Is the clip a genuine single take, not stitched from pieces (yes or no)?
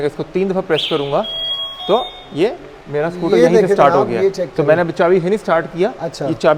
yes